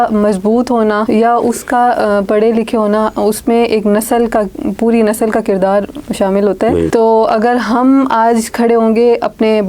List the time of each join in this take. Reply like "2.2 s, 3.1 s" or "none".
1.0 s, 6.9 s